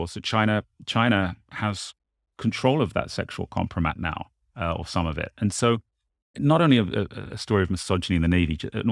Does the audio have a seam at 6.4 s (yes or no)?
yes